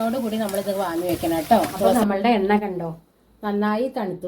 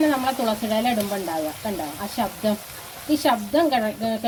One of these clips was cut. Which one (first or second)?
first